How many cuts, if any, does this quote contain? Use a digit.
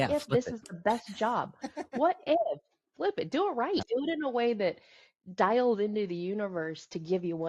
1